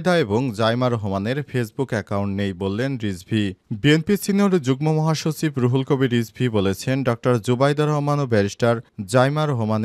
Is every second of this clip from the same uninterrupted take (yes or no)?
yes